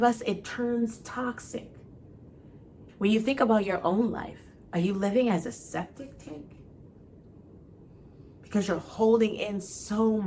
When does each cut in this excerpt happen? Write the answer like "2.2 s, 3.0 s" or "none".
2.8 s